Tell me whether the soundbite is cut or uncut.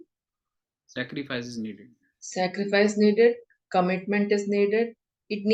uncut